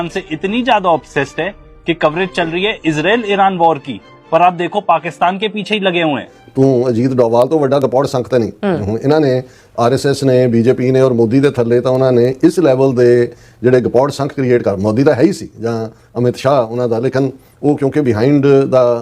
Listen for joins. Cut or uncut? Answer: cut